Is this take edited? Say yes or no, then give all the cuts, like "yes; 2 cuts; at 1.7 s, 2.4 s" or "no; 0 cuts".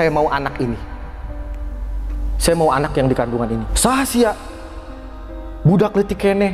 yes; 1 cut; at 3.7 s